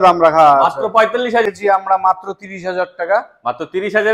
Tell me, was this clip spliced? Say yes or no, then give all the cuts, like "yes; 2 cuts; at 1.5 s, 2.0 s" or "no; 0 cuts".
yes; 1 cut; at 1.5 s